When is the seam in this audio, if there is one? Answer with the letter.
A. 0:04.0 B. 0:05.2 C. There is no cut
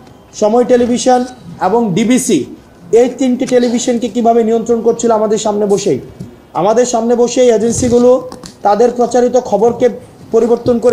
C